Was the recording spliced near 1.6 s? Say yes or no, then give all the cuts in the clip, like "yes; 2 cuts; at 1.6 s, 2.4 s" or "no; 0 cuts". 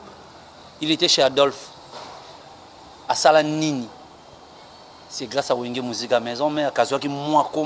no; 0 cuts